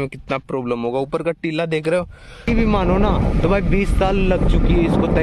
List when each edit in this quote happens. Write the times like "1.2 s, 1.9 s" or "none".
2.5 s

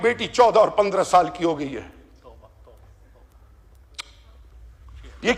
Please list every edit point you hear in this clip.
none

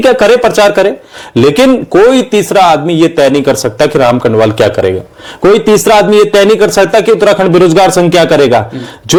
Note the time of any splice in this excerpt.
none

